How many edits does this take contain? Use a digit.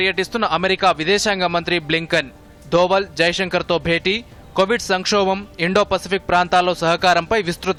0